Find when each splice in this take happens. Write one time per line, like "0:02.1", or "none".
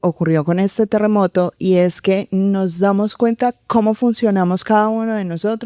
none